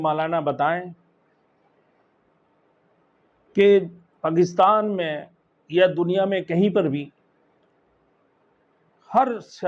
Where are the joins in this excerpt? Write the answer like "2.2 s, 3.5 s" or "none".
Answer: none